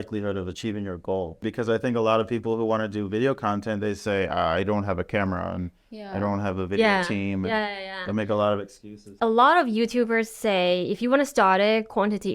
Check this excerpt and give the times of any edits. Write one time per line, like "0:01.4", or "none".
0:01.5
0:09.1